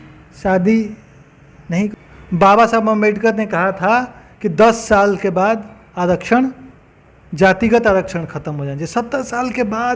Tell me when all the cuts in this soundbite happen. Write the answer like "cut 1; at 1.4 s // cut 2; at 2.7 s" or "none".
cut 1; at 1.9 s